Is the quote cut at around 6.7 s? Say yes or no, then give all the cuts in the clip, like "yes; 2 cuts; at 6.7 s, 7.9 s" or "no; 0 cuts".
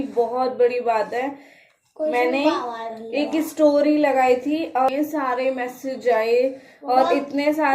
no; 1 cut; at 4.9 s